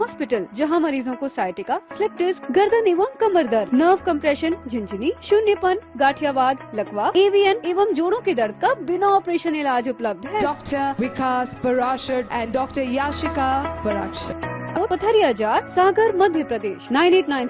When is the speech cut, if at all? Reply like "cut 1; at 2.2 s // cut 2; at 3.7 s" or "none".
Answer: cut 1; at 14.7 s